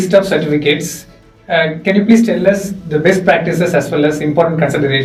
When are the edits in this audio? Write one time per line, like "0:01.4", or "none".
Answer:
none